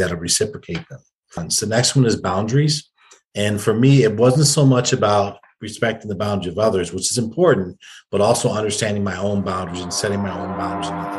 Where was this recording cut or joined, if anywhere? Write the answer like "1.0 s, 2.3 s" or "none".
1.5 s

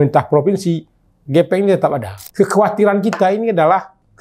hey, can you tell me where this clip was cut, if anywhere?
2.2 s

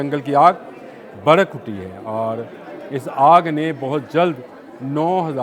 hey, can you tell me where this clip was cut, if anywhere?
none

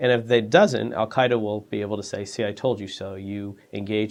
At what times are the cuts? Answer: none

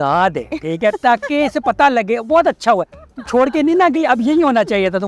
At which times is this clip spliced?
none

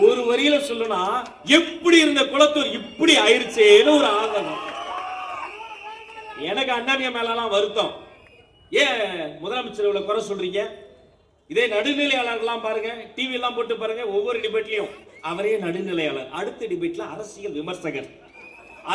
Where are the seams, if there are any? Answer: none

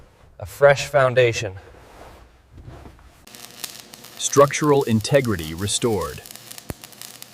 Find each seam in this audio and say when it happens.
3.3 s

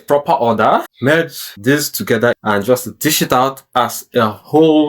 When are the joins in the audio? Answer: 1.0 s, 2.4 s

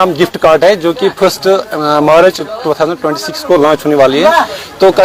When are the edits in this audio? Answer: none

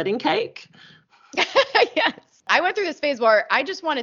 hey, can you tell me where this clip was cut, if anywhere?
2.5 s

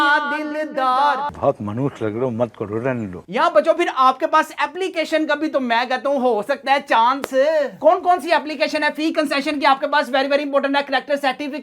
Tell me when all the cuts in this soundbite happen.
none

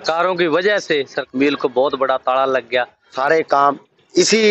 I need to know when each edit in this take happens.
1.2 s, 3.2 s

